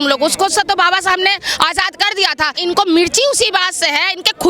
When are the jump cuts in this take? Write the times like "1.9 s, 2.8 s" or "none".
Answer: 2.5 s